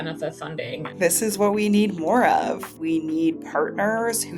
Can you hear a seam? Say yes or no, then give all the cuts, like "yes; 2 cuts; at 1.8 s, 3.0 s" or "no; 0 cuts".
yes; 2 cuts; at 1.0 s, 2.7 s